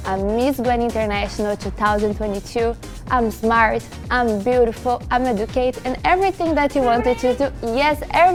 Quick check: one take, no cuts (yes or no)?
yes